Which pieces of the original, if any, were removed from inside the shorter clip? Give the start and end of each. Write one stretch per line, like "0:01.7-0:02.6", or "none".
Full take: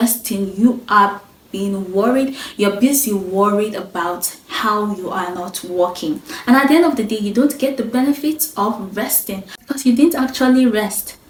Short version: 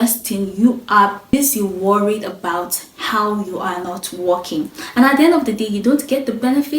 0:01.3-0:02.8